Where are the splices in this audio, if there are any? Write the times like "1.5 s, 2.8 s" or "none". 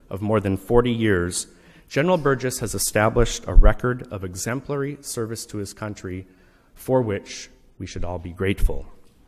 none